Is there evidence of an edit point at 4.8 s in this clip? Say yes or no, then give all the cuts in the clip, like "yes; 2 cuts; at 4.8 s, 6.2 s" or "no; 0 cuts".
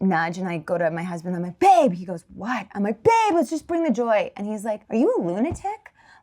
yes; 1 cut; at 4.8 s